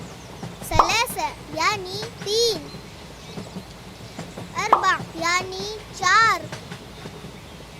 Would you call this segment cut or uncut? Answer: cut